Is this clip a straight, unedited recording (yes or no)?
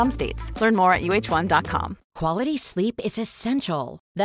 no